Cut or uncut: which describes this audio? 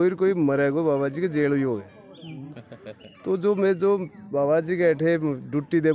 uncut